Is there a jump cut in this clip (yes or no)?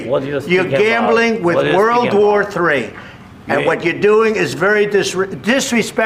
no